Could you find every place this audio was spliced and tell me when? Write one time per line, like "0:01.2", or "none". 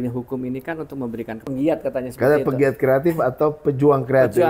0:01.4